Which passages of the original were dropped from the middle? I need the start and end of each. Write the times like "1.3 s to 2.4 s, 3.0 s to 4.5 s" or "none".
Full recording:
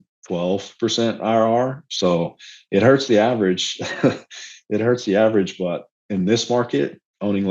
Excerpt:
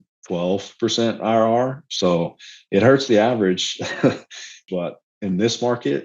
4.6 s to 5.5 s